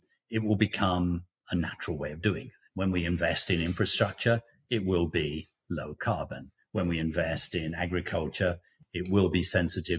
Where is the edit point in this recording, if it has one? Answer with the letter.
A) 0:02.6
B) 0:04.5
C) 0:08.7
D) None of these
C